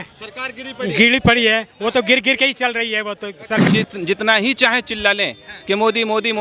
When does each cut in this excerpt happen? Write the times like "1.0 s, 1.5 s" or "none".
3.7 s